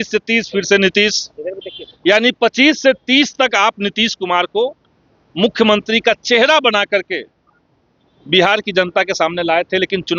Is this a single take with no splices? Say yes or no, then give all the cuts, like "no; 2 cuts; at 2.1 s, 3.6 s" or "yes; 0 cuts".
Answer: yes; 0 cuts